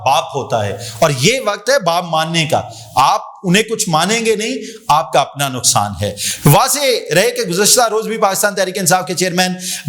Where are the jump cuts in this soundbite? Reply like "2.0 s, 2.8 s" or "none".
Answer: none

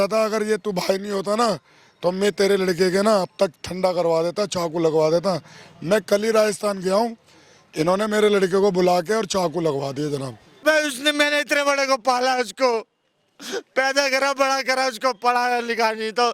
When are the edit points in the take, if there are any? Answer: 10.6 s

